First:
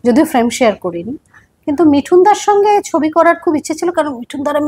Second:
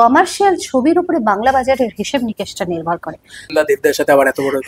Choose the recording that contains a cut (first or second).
second